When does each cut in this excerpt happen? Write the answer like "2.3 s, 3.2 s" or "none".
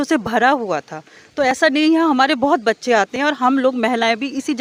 none

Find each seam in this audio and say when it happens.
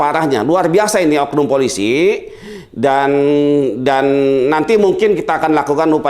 none

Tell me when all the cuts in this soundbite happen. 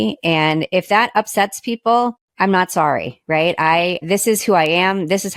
2.2 s, 4.0 s

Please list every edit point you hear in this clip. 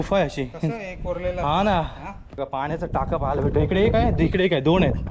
2.4 s

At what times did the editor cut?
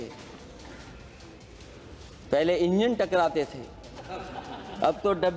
none

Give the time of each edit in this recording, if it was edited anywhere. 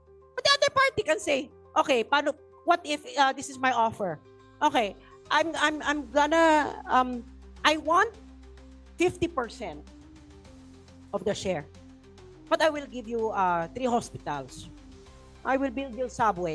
none

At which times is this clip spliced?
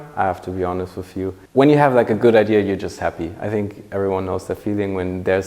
1.4 s

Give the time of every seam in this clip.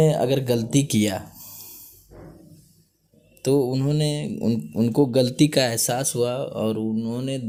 none

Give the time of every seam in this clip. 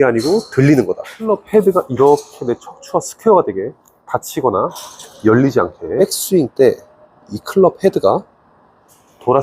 1.3 s, 6.0 s

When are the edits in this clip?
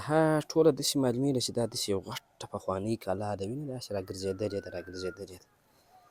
none

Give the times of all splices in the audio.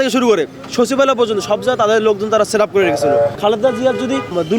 3.3 s

